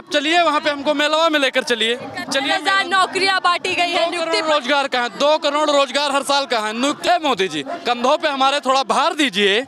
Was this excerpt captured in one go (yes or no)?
no